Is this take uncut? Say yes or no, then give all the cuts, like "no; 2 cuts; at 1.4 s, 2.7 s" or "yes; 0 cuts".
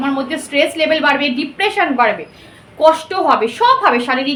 yes; 0 cuts